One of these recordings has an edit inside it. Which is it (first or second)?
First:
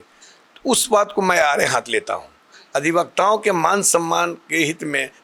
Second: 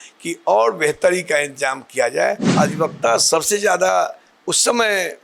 second